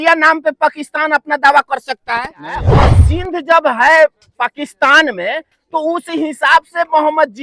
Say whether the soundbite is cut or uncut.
cut